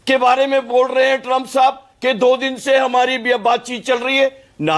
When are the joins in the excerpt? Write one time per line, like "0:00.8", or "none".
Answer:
none